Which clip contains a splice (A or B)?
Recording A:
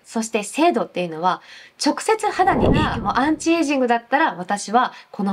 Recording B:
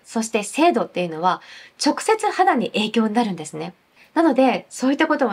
A